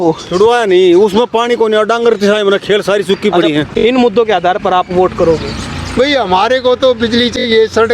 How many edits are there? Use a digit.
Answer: 1